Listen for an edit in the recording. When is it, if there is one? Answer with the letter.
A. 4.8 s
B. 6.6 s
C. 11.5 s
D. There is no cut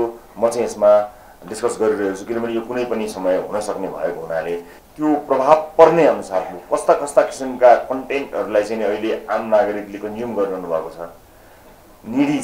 A